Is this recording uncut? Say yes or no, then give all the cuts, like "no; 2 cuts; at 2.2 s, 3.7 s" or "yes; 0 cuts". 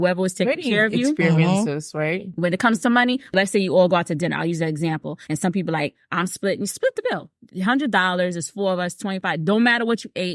no; 2 cuts; at 3.3 s, 5.1 s